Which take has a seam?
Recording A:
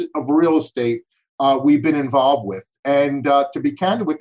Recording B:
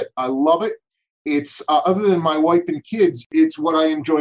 B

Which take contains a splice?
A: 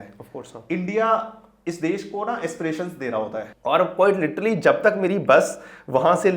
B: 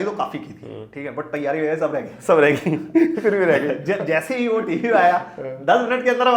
A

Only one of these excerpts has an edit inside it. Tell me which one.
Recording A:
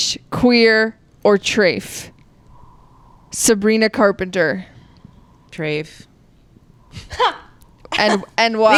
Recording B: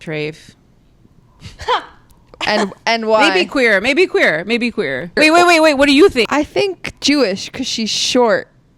B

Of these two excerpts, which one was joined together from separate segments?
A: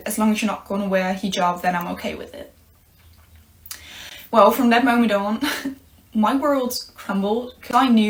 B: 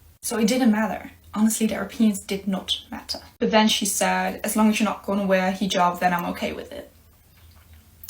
B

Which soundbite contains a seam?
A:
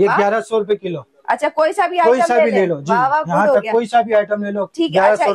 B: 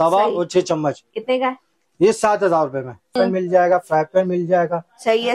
B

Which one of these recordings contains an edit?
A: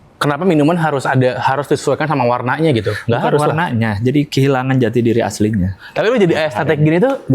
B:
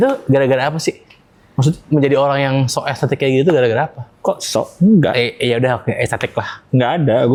A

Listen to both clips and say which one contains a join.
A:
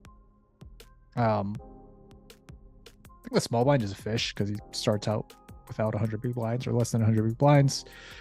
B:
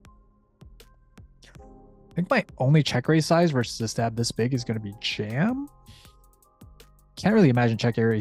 A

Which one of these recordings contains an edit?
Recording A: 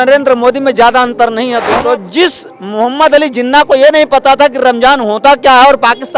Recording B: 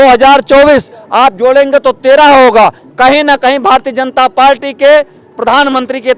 A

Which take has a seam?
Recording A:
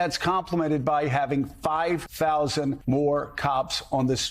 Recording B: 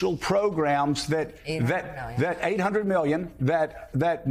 A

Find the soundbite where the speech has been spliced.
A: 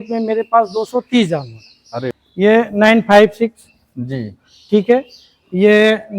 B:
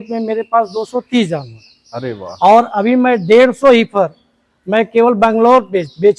A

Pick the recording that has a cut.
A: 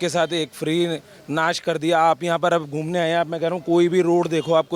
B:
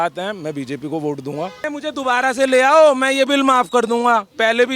B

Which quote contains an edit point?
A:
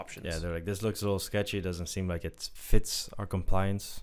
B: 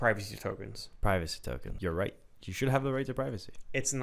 B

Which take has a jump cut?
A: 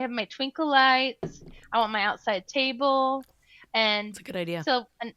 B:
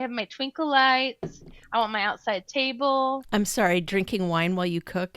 B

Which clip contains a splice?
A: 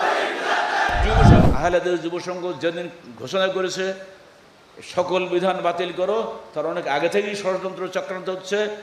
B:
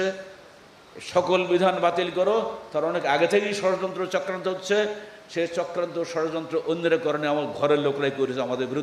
A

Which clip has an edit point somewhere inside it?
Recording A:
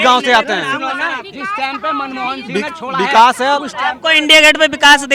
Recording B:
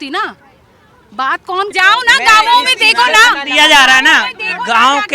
B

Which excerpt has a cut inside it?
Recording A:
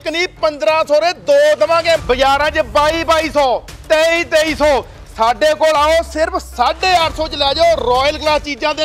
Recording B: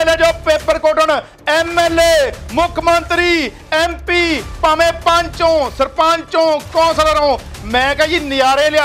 A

